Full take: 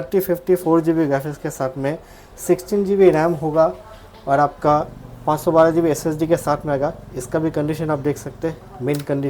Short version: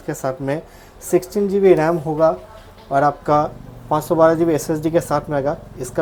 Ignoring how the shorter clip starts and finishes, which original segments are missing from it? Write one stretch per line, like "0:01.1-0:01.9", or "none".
none